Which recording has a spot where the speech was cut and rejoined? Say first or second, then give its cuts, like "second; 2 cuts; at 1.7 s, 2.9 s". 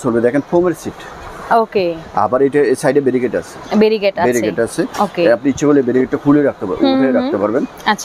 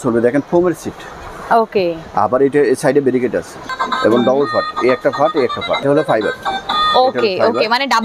second; 2 cuts; at 3.6 s, 5.8 s